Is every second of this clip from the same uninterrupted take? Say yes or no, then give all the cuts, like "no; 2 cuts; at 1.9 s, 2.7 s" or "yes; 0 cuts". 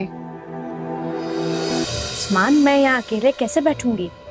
no; 1 cut; at 1.8 s